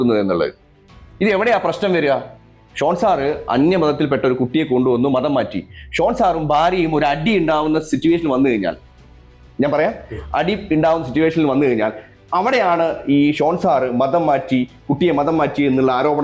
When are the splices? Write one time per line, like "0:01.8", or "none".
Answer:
none